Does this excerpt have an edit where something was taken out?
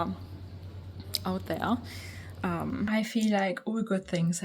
yes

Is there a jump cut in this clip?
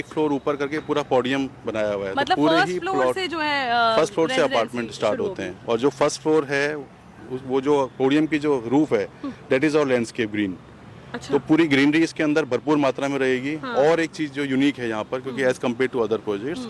no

